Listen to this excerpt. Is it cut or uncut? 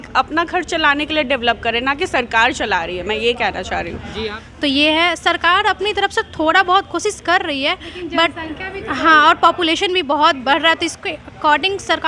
cut